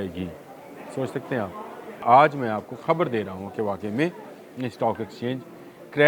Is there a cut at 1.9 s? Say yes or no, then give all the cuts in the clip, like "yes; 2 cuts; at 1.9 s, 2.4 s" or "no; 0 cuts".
yes; 1 cut; at 1.9 s